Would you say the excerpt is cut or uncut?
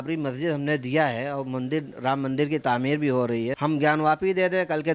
cut